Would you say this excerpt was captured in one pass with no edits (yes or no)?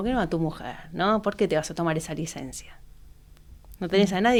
yes